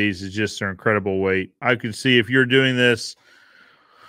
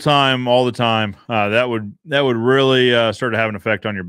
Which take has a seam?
first; 1 cut; at 1.6 s

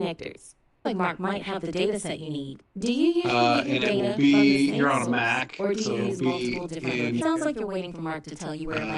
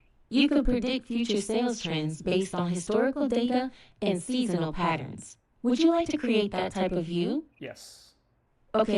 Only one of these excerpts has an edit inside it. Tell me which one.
first; 2 cuts; at 0.8 s, 7.2 s

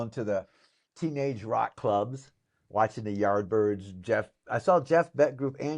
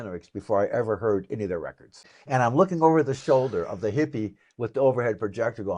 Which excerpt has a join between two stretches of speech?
second; 1 cut; at 2.4 s

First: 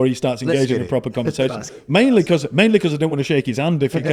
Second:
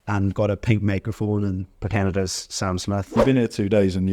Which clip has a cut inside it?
second; 1 cut; at 3.2 s

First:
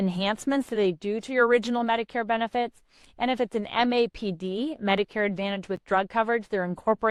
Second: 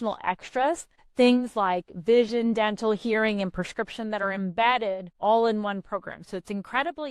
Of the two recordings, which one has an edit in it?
second; 2 cuts; at 1.0 s, 5.1 s

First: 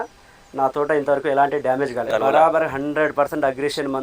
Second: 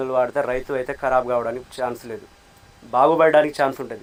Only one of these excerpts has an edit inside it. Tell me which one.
first; 1 cut; at 2.0 s

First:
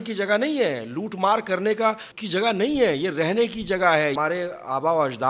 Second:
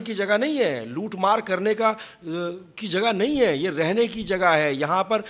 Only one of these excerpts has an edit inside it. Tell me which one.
first; 2 cuts; at 2.1 s, 4.2 s

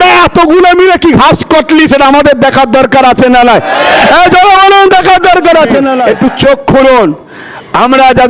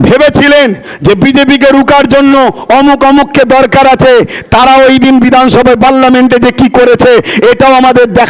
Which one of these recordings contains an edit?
first; 1 cut; at 6.0 s

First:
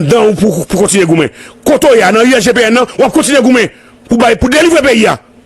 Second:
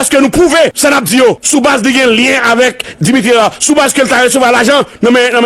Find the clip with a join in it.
second; 2 cuts; at 0.8 s, 1.4 s

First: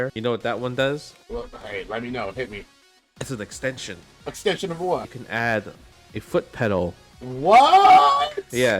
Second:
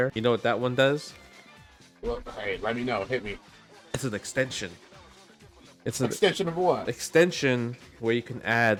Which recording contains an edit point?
first; 4 cuts; at 1.1 s, 4.4 s, 5.2 s, 7.3 s

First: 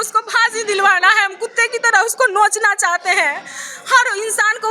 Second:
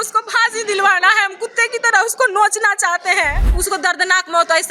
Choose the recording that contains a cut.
second; 1 cut; at 3.5 s

